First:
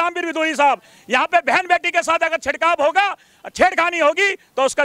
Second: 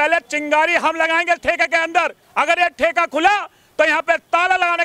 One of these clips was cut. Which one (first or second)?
second